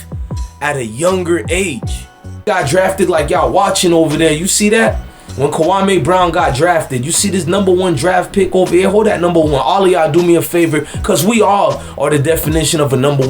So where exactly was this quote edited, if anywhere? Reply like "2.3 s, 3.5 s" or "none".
2.4 s